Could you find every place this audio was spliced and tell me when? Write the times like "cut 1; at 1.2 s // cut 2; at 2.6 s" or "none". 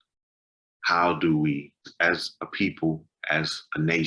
cut 1; at 1.9 s